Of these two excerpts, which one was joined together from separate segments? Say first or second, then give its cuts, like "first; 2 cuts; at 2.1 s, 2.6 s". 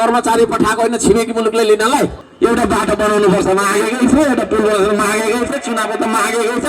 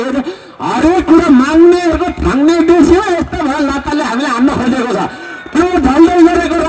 first; 1 cut; at 2.2 s